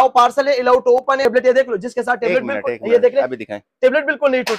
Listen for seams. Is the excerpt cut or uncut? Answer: cut